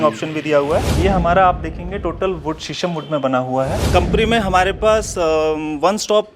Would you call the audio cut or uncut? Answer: cut